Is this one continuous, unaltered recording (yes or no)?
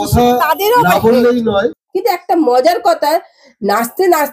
no